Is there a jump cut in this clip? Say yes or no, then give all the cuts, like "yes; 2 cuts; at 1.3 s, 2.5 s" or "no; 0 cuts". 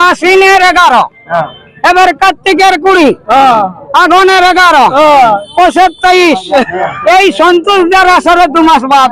no; 0 cuts